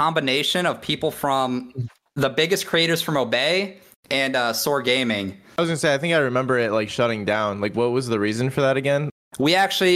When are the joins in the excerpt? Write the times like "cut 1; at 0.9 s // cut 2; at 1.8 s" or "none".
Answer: cut 1; at 5.6 s // cut 2; at 9.1 s